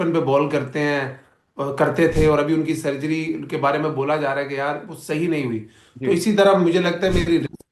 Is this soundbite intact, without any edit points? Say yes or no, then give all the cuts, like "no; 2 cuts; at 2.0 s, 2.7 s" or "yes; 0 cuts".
yes; 0 cuts